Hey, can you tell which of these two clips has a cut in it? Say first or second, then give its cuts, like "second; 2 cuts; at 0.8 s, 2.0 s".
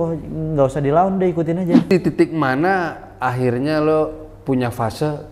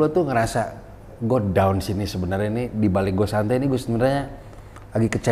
first; 1 cut; at 1.9 s